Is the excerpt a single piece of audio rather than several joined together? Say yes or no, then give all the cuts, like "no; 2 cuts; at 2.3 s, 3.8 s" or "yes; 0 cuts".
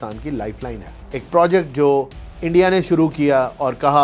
no; 1 cut; at 0.9 s